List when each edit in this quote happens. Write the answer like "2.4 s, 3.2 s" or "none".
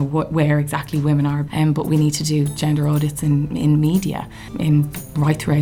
1.4 s, 4.5 s